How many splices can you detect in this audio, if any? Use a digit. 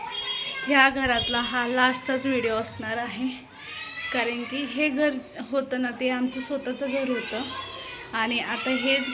0